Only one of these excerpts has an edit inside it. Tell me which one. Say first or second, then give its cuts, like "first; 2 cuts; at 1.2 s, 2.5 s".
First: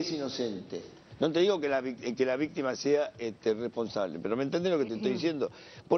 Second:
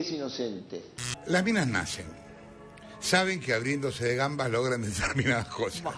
second; 1 cut; at 1.1 s